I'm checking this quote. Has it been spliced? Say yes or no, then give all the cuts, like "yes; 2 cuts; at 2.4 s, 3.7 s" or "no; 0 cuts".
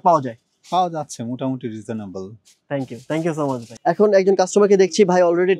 no; 0 cuts